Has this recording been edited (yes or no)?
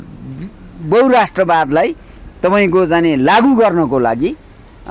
no